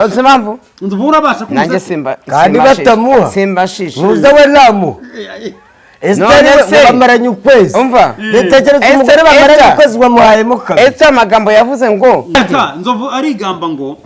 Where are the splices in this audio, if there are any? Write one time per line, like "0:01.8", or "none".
0:12.3